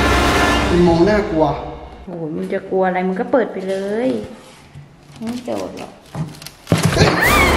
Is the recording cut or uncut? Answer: uncut